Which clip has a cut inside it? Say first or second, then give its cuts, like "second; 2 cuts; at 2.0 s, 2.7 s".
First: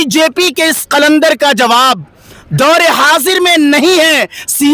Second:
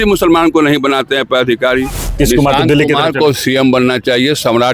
second; 1 cut; at 2.2 s